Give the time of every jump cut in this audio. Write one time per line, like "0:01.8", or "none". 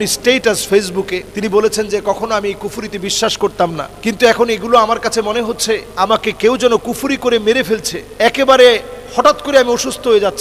0:01.3
0:03.9
0:05.9
0:08.0